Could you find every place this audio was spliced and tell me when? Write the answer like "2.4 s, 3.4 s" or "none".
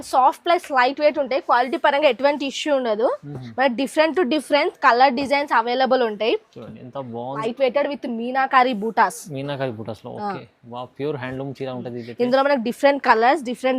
7.4 s